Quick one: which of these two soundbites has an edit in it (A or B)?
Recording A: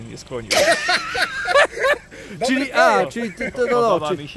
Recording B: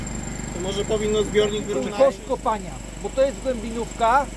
B